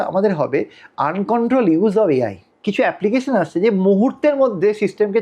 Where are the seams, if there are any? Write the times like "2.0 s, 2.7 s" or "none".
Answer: 2.5 s